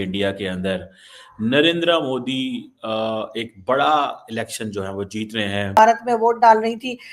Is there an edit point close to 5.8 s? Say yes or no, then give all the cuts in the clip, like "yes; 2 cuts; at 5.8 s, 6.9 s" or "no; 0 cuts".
yes; 1 cut; at 5.8 s